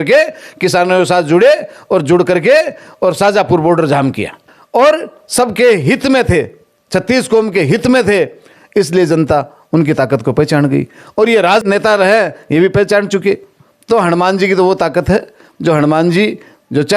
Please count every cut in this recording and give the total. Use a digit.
2